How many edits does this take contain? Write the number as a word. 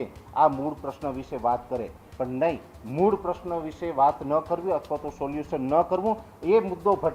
zero